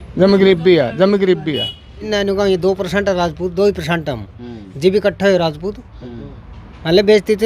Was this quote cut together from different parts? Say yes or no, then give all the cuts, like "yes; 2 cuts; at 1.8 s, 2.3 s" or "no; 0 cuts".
yes; 1 cut; at 2.1 s